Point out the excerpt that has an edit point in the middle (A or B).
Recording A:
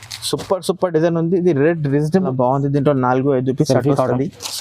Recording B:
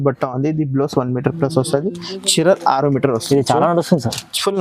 A